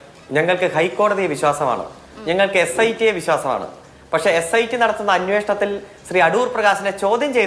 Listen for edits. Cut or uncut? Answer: uncut